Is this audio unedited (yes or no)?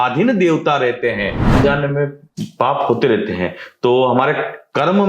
no